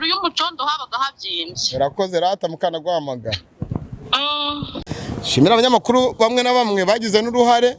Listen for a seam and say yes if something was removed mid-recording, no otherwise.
yes